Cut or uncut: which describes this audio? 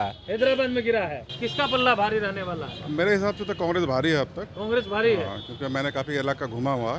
cut